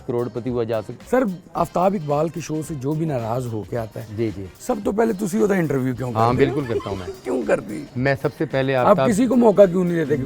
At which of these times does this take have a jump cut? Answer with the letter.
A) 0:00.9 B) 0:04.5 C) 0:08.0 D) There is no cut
A